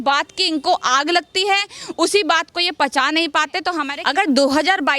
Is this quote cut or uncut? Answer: cut